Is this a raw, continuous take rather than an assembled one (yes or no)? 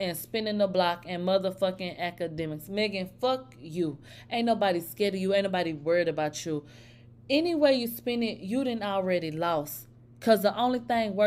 yes